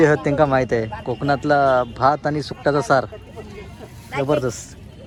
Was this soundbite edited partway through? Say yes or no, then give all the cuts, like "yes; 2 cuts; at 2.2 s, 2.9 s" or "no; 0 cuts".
no; 0 cuts